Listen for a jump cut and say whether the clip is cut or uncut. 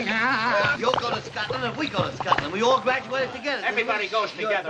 uncut